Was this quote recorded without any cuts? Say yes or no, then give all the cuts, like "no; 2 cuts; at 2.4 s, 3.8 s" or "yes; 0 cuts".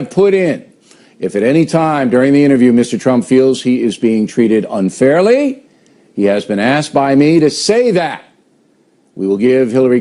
no; 1 cut; at 8.8 s